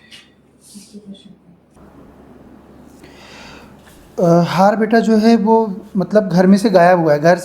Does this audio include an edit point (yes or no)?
yes